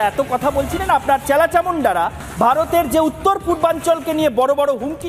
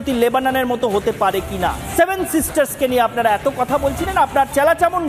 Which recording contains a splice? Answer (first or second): second